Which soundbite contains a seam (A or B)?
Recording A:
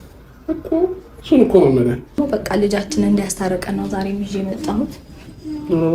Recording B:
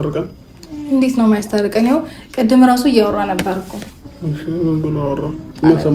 A